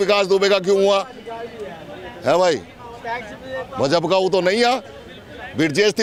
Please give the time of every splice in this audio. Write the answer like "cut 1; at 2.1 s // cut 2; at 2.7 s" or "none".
none